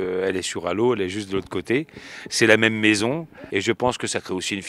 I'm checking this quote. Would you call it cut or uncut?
cut